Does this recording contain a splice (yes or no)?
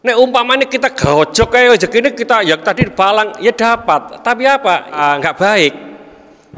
yes